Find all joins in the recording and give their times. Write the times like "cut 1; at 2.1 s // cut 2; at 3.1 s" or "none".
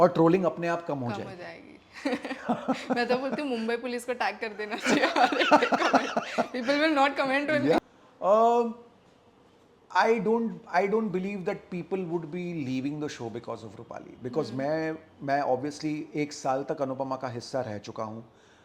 cut 1; at 7.8 s